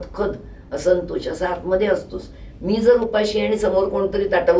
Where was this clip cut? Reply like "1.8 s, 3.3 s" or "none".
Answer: none